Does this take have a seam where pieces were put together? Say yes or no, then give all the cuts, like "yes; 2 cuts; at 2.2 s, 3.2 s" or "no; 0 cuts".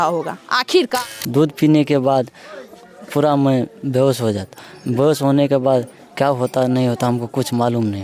yes; 1 cut; at 1.1 s